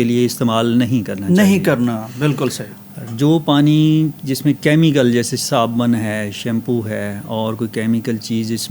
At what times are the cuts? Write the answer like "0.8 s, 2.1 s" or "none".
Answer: none